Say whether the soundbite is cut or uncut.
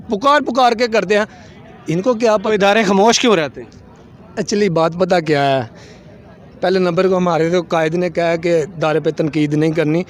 uncut